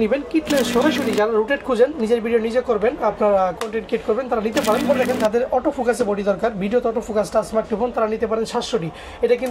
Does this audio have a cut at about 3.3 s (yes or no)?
no